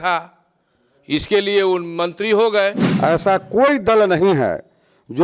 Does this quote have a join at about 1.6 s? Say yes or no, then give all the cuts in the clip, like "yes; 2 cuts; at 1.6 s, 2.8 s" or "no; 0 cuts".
no; 1 cut; at 2.9 s